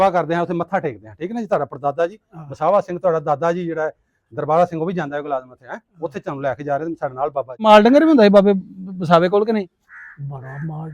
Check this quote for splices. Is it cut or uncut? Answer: cut